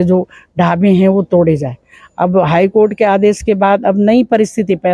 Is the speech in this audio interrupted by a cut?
no; 0 cuts

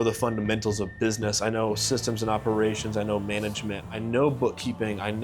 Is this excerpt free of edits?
yes; 0 cuts

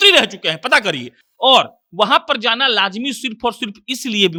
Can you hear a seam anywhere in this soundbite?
no; 0 cuts

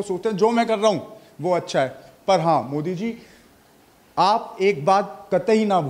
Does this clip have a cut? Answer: no; 0 cuts

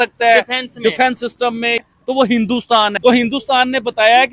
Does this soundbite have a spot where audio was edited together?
yes; 1 cut; at 2.9 s

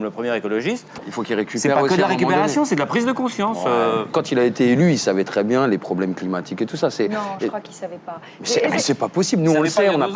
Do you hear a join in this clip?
yes; 1 cut; at 1.0 s

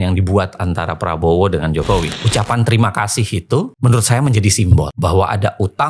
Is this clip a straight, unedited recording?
no; 1 cut; at 2.2 s

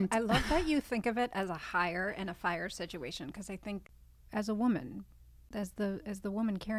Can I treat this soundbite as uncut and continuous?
no; 2 cuts; at 3.9 s, 5.4 s

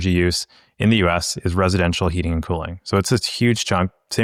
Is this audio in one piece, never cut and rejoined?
yes; 0 cuts

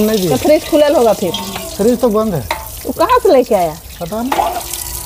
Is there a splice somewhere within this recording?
no; 0 cuts

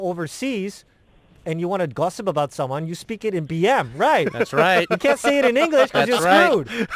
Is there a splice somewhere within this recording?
no; 0 cuts

